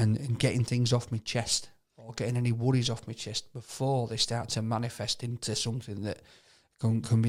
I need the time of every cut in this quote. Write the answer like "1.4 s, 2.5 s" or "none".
none